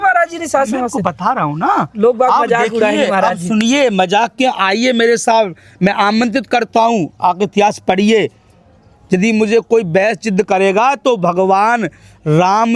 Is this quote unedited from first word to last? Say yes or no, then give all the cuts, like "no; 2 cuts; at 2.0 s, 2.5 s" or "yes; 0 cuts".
yes; 0 cuts